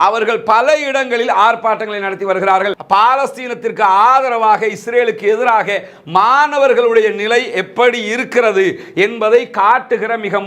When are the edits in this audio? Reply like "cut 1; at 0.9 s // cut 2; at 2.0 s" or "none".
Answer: cut 1; at 2.8 s